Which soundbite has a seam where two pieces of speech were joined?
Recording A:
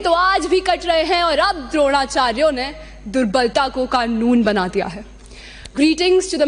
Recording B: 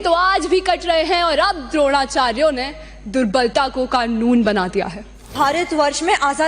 B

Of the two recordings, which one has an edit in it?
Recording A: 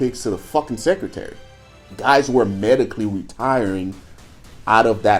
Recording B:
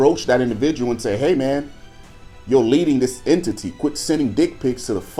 A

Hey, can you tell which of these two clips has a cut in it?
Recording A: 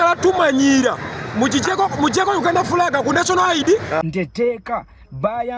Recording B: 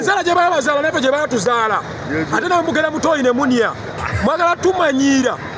A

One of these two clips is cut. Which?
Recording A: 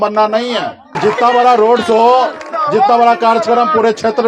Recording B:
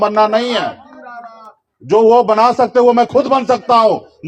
A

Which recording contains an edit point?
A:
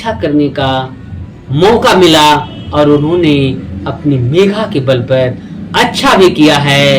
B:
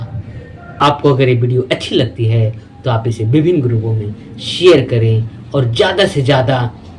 B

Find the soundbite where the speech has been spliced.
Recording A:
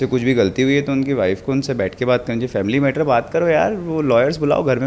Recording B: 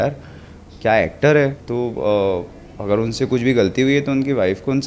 B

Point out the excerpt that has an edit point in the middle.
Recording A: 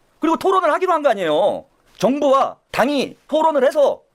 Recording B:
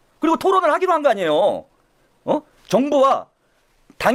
A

